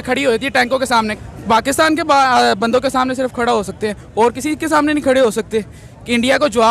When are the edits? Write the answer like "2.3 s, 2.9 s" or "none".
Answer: 1.1 s